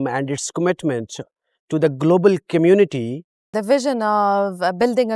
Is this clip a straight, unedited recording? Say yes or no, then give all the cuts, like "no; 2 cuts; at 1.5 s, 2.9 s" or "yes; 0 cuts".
no; 1 cut; at 3.5 s